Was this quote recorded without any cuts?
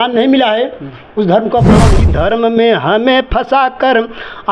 no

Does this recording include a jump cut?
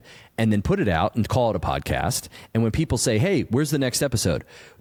no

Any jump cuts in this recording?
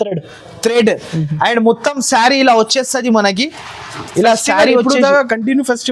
no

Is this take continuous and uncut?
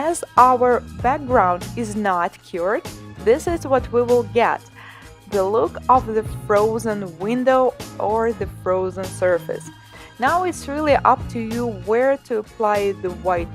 no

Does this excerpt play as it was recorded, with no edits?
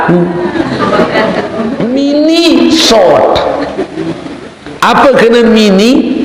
no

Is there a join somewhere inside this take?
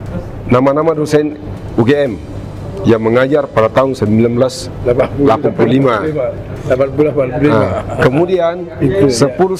no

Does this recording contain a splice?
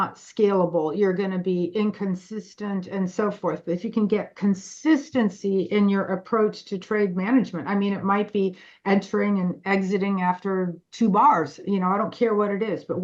no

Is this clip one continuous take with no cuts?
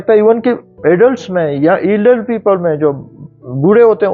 yes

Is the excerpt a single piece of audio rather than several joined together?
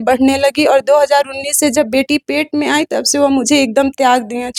yes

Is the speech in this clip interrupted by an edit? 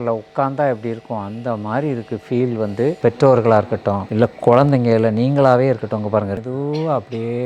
yes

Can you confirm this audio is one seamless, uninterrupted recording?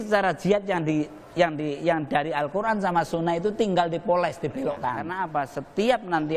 no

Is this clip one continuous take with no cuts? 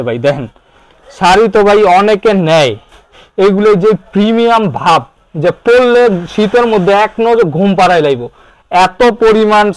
yes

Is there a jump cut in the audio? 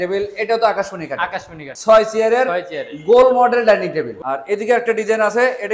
yes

